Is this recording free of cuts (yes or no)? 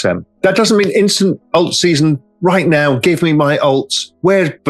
yes